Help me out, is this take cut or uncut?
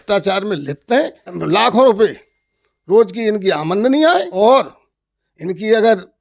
cut